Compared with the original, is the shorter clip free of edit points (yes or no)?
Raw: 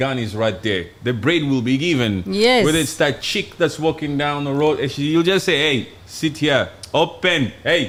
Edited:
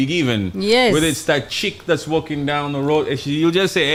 yes